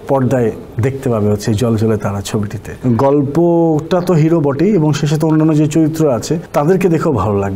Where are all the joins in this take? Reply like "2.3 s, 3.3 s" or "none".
2.6 s, 6.4 s